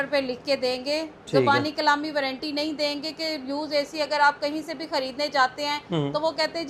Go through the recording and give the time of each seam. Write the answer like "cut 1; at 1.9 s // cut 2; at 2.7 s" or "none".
none